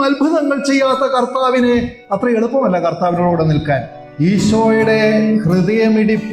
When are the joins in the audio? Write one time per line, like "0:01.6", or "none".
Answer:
0:04.0